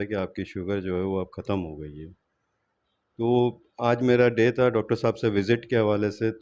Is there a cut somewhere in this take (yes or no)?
no